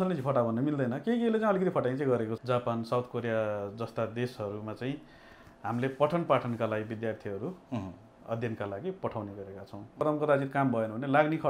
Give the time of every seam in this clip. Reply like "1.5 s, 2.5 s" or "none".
2.3 s, 10.0 s